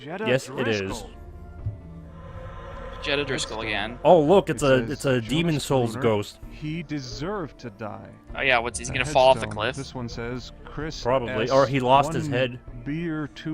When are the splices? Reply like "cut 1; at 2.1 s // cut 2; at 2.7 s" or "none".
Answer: cut 1; at 1.1 s